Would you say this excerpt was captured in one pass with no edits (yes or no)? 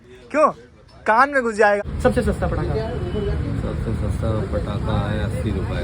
no